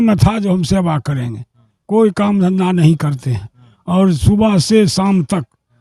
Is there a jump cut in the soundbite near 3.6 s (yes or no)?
no